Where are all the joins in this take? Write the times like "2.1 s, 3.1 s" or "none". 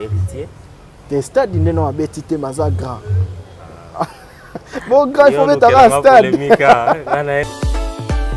7.5 s